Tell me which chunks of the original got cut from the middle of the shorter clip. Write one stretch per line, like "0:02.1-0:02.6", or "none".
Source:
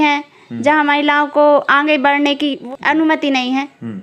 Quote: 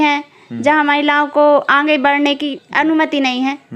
0:02.6-0:02.7